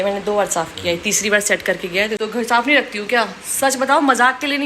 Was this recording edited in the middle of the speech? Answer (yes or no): yes